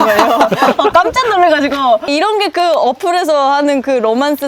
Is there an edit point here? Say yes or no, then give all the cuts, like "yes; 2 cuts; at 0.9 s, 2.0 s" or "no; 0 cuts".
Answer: no; 0 cuts